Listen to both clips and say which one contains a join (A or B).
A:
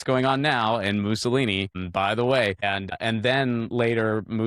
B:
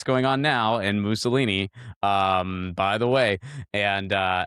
A